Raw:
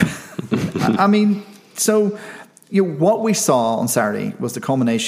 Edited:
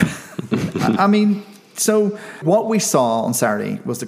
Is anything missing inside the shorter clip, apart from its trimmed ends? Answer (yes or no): yes